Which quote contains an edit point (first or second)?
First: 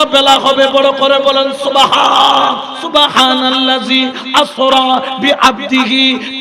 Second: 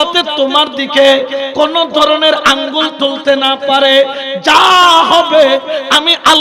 first